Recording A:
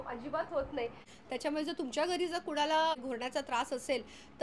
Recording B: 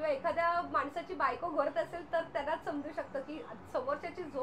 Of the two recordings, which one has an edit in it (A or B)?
A